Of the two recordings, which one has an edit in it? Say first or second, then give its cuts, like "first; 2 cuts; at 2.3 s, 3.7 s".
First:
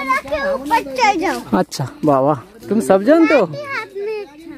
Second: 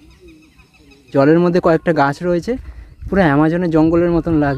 second; 1 cut; at 1.1 s